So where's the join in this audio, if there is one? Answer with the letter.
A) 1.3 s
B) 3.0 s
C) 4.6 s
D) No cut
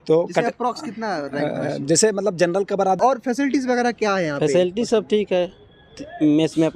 B